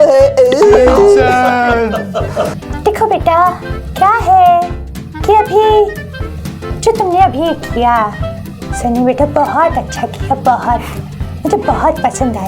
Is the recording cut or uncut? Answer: cut